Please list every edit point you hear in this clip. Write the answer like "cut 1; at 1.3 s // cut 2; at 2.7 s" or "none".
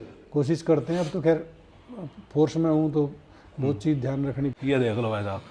cut 1; at 4.6 s